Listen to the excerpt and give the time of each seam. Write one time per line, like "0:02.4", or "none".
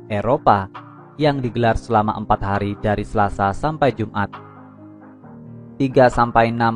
0:04.3
0:05.8